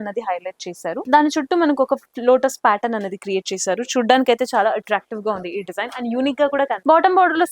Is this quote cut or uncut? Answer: uncut